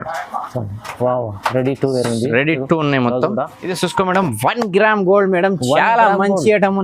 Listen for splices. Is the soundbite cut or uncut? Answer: cut